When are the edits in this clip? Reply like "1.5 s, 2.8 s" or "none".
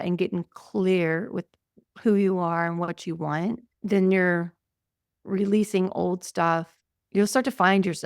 3.7 s, 6.8 s